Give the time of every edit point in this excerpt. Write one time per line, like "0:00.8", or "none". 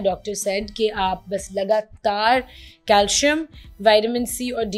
none